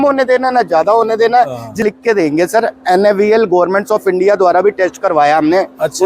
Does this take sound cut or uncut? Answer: cut